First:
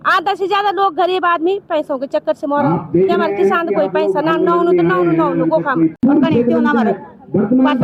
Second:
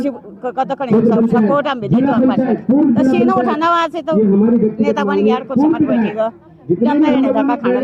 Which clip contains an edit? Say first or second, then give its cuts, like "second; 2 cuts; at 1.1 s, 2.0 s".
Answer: first; 1 cut; at 5.9 s